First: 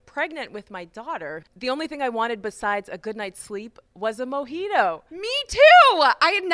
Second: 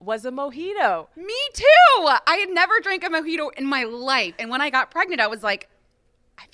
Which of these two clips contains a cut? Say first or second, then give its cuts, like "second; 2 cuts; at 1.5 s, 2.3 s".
first; 1 cut; at 1.5 s